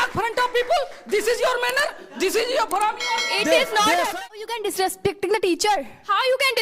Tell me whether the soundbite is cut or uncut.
cut